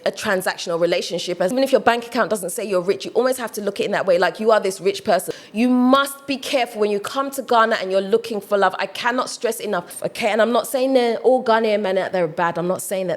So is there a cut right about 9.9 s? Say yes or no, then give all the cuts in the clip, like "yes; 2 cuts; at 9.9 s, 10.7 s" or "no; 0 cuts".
yes; 3 cuts; at 1.5 s, 5.4 s, 9.9 s